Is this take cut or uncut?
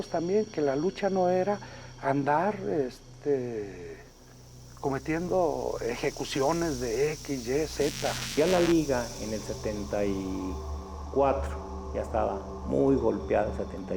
cut